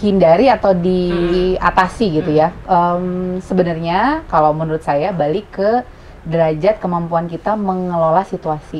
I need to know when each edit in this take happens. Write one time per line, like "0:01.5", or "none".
none

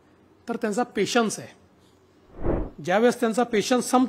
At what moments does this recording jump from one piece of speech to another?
0:02.4

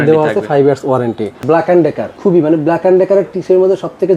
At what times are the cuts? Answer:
0:01.4
0:02.1

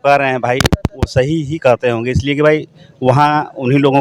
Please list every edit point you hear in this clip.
none

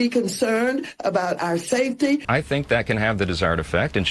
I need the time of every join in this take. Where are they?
0:02.2

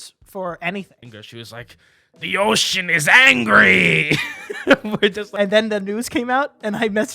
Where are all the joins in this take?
0:01.0
0:05.2

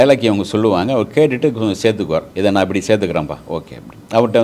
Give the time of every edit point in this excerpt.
0:02.3

